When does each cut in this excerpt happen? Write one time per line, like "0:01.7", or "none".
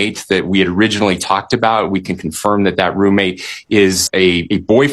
0:04.0